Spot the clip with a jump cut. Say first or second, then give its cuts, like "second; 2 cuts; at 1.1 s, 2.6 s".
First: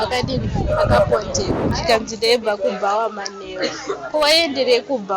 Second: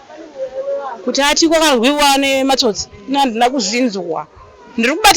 first; 1 cut; at 1.7 s